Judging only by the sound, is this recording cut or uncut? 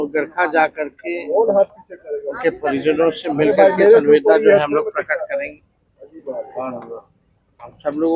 uncut